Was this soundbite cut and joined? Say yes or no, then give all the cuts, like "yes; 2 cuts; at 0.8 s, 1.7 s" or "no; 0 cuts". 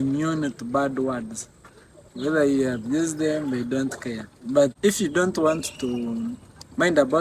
yes; 1 cut; at 4.8 s